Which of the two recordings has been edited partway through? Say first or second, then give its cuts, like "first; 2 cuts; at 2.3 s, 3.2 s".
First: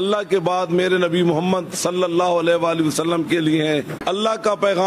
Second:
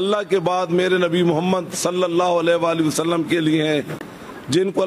first; 1 cut; at 3.9 s